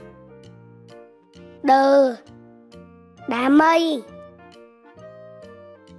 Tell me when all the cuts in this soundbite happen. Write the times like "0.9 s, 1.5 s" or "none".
none